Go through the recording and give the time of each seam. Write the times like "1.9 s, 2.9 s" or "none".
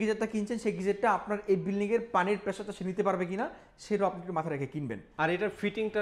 5.0 s

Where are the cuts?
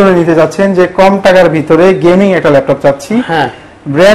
none

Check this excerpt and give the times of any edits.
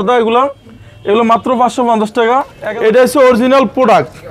2.6 s

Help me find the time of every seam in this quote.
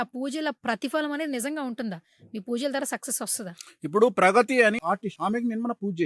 4.8 s

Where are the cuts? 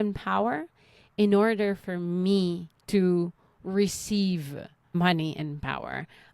2.7 s, 4.7 s

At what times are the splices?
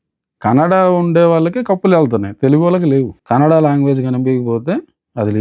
3.2 s

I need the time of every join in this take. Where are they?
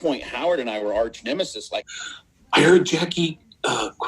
1.9 s

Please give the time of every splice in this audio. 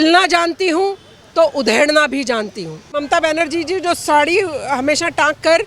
2.9 s

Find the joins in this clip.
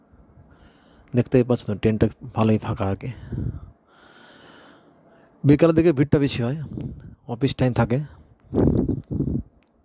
none

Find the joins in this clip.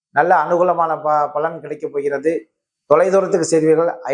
none

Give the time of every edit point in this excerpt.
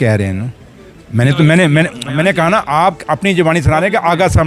none

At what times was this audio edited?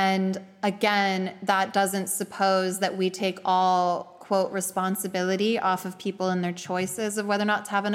none

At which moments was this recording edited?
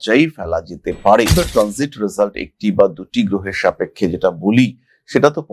1.3 s

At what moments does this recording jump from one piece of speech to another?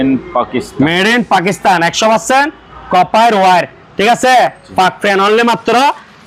none

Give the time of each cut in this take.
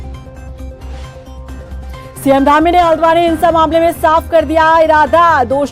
none

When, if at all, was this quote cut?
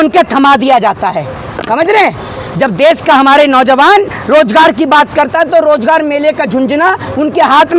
none

